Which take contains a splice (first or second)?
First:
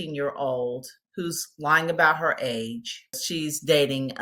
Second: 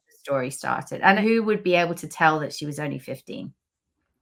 first